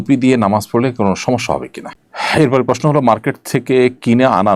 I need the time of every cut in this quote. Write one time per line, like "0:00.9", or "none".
0:01.8